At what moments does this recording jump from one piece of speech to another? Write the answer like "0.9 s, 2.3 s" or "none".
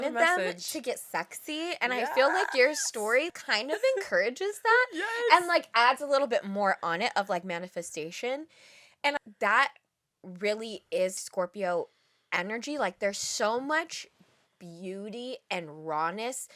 3.3 s, 9.2 s, 11.2 s